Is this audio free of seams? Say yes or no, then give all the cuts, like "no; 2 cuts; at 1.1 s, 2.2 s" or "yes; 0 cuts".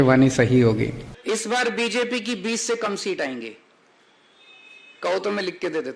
no; 1 cut; at 1.1 s